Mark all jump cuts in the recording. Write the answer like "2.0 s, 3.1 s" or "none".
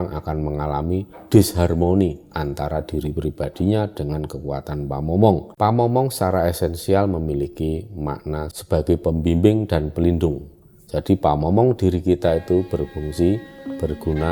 5.5 s